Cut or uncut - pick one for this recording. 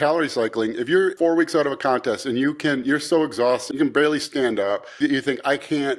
cut